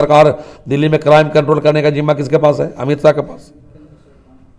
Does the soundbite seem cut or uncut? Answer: uncut